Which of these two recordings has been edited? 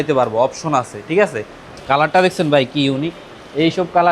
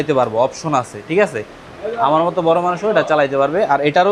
first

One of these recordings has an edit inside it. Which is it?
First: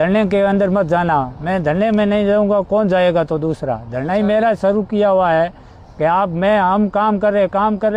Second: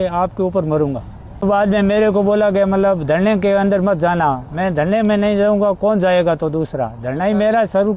second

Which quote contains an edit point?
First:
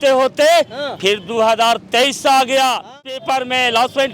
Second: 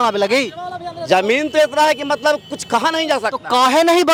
first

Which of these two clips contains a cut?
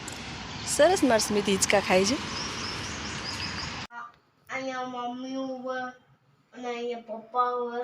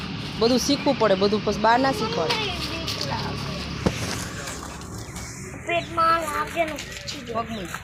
first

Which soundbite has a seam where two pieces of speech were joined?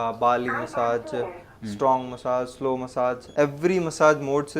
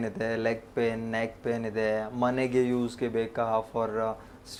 first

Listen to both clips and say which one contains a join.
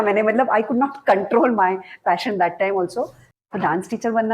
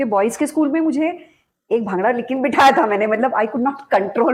first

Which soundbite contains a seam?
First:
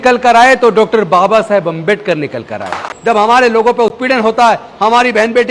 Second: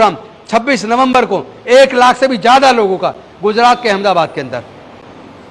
first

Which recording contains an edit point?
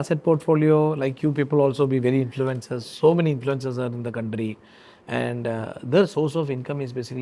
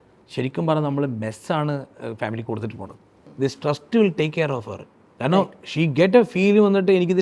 second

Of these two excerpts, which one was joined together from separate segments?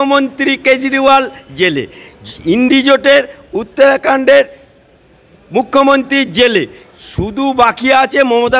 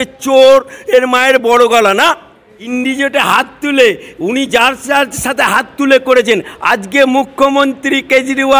second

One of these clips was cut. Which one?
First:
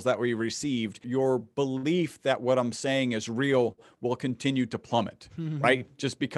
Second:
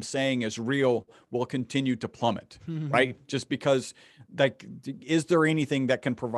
first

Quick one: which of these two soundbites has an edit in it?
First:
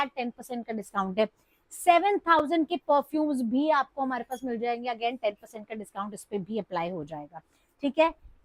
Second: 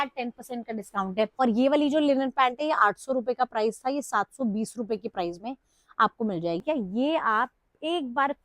second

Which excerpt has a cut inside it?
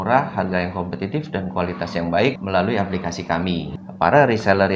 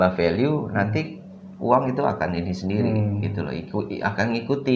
first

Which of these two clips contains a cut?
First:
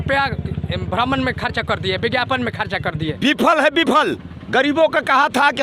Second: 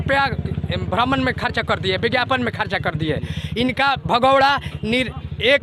first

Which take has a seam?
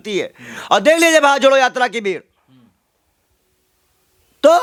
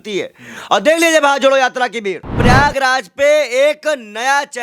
second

